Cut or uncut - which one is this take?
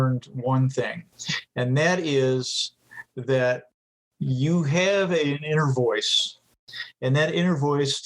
cut